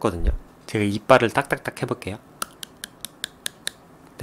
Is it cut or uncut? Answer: uncut